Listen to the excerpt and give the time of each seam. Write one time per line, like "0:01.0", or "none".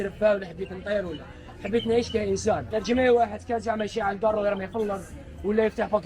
0:02.7